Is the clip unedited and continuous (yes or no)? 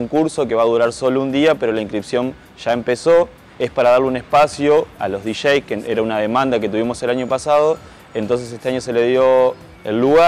yes